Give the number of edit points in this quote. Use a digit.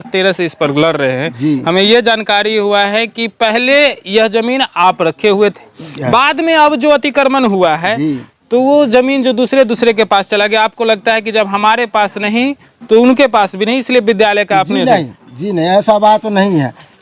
0